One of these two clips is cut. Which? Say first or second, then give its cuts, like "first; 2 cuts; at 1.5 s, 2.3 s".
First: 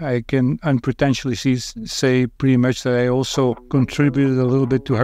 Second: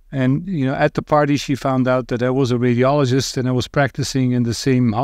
first; 1 cut; at 3.6 s